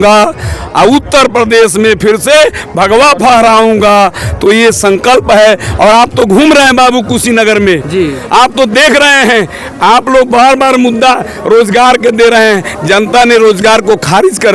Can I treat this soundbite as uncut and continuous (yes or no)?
yes